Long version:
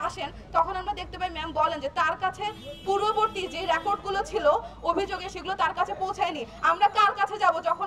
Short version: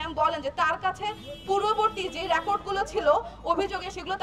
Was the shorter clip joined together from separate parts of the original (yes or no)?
no